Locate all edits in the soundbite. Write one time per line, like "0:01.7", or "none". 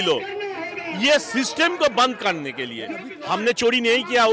0:03.1